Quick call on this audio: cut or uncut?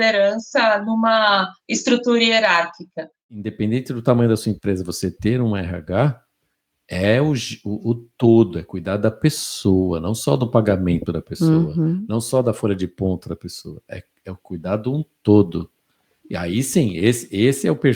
cut